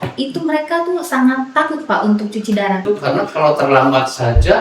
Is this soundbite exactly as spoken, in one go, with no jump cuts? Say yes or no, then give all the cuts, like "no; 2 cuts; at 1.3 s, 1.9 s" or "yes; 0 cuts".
no; 1 cut; at 2.8 s